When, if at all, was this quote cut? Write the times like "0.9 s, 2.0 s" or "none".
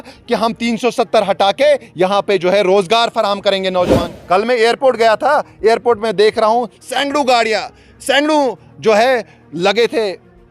4.1 s